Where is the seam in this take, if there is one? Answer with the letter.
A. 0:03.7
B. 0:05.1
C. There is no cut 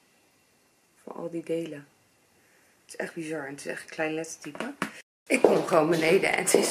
B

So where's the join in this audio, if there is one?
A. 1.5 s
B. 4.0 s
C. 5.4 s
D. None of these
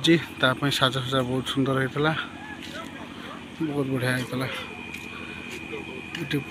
D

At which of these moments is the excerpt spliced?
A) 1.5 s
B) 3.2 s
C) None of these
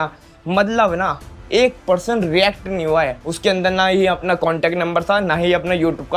B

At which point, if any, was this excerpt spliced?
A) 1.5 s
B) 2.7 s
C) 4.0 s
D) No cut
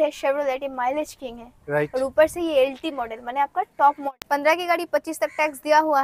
C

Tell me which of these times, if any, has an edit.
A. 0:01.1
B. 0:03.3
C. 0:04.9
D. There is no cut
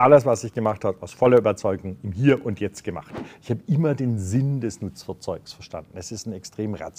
B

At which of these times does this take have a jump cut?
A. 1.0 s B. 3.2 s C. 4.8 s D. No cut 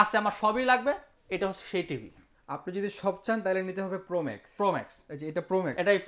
D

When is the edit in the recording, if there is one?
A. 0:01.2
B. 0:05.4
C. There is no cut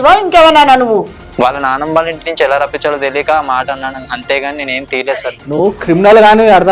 A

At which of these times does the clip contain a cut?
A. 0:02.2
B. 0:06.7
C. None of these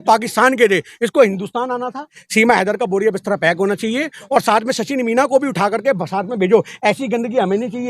A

